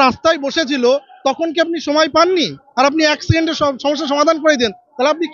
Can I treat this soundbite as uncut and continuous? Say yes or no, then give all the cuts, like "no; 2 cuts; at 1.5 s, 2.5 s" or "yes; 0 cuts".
yes; 0 cuts